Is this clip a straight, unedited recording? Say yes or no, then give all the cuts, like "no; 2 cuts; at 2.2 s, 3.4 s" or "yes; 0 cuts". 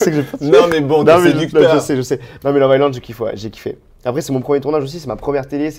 yes; 0 cuts